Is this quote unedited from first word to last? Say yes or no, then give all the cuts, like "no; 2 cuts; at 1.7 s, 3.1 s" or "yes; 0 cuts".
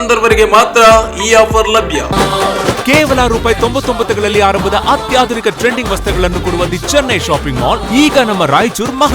no; 1 cut; at 2.1 s